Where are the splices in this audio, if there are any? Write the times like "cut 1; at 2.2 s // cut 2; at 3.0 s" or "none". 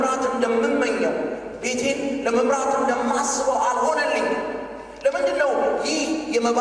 none